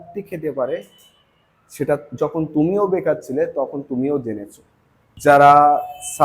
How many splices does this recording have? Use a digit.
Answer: 1